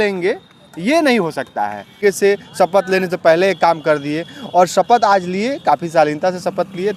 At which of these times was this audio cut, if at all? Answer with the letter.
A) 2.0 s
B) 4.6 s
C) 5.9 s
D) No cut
A